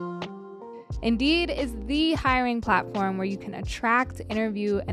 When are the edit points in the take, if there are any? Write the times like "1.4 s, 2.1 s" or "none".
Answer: 0.9 s